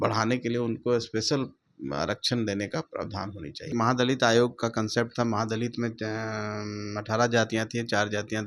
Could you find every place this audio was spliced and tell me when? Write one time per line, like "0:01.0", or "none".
0:03.7